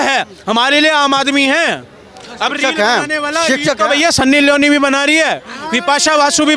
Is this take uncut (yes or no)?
yes